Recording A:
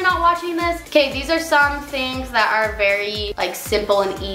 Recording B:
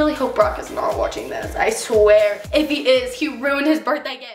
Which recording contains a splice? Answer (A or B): A